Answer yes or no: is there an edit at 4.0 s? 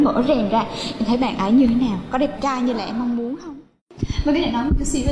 yes